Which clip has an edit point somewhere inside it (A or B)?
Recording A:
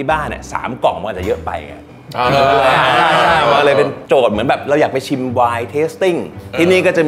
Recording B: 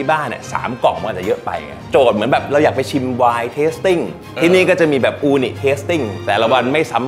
B